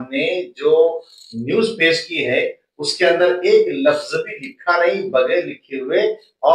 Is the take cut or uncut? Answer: uncut